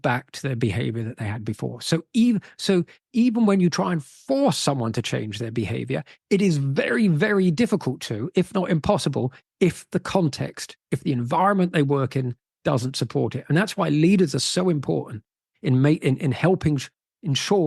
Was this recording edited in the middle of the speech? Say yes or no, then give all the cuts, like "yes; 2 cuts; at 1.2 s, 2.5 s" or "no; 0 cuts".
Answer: no; 0 cuts